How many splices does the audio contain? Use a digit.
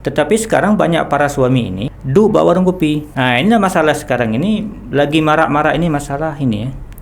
2